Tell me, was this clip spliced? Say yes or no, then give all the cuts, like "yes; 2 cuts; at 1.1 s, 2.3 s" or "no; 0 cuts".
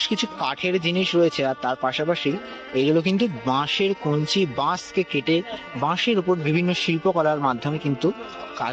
no; 0 cuts